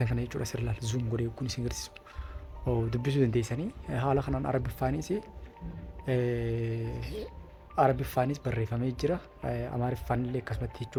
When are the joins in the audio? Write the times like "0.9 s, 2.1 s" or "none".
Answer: none